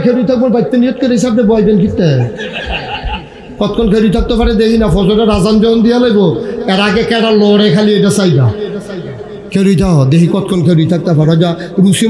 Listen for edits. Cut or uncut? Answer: uncut